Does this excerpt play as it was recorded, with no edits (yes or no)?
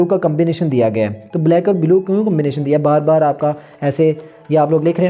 yes